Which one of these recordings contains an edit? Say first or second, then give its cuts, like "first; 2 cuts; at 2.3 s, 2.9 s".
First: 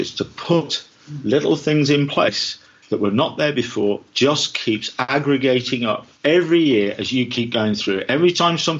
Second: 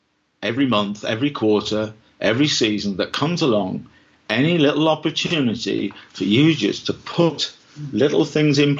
first; 2 cuts; at 5.0 s, 6.1 s